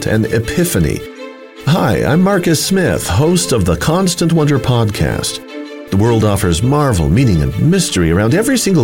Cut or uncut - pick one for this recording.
uncut